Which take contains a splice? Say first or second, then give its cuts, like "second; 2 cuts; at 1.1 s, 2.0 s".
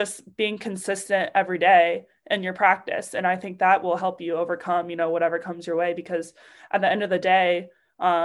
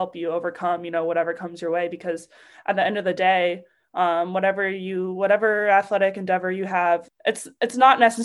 second; 1 cut; at 7.1 s